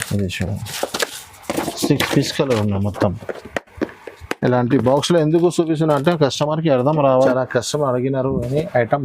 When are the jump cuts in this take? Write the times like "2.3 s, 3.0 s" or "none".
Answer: 7.3 s